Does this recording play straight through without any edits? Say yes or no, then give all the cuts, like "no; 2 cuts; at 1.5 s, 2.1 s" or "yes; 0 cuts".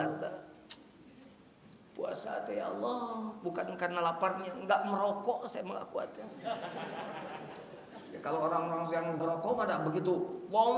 yes; 0 cuts